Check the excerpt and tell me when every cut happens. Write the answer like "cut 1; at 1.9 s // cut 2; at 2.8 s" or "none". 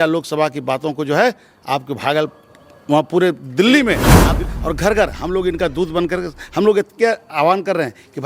cut 1; at 4.4 s